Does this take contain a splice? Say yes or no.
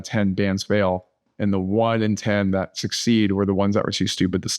no